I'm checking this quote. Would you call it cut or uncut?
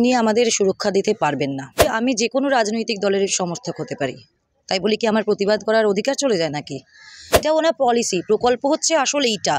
cut